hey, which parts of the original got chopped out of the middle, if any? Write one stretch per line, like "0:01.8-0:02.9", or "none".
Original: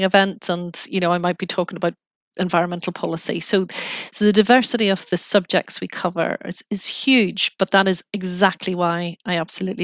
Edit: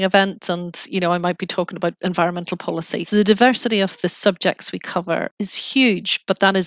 0:02.0-0:02.3
0:03.4-0:04.1
0:06.4-0:06.6